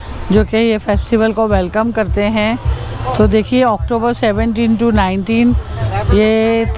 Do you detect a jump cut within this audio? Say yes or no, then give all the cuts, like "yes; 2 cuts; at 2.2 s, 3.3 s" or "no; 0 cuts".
no; 0 cuts